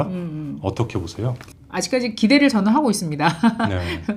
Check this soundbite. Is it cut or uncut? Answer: cut